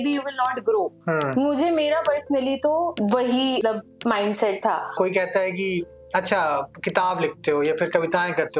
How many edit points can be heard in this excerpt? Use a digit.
1